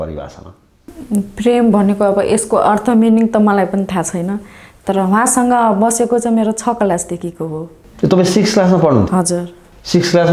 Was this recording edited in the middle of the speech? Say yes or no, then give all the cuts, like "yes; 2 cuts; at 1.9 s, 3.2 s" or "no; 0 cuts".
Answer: no; 0 cuts